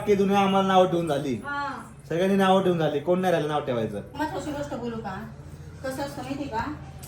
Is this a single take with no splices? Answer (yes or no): yes